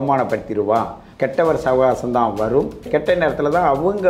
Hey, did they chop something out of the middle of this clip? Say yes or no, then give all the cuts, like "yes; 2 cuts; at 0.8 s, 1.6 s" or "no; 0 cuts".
yes; 2 cuts; at 1.0 s, 2.9 s